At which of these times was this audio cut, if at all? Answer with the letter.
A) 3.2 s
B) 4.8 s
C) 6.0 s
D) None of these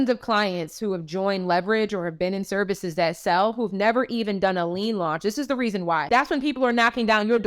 C